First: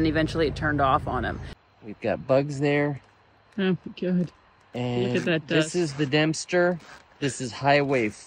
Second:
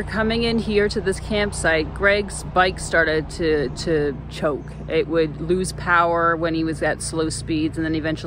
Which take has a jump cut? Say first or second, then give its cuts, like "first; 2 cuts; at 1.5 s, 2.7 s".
first; 1 cut; at 1.5 s